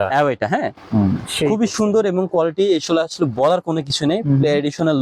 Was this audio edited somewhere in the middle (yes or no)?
no